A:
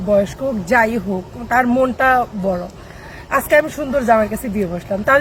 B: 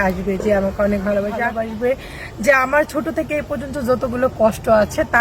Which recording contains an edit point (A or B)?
B